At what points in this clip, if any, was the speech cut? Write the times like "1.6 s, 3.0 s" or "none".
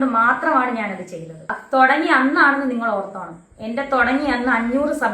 1.5 s